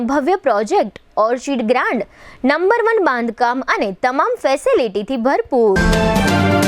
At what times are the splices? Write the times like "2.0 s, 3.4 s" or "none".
5.8 s